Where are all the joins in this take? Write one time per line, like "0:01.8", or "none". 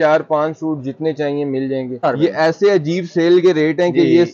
0:02.0